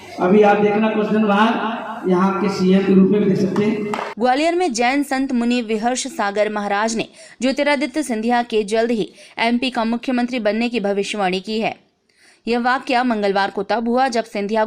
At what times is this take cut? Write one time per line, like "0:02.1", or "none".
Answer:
0:04.1